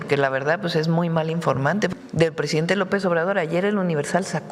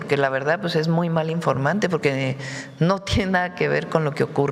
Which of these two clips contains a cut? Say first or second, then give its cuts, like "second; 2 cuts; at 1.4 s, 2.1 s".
first; 1 cut; at 1.9 s